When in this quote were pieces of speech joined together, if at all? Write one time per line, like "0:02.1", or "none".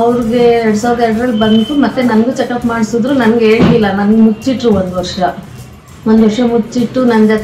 0:03.4